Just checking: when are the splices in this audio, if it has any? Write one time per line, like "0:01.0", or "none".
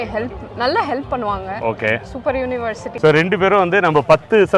0:02.9